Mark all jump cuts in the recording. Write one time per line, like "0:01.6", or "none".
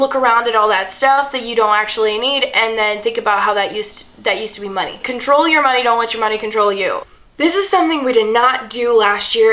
0:05.1
0:07.0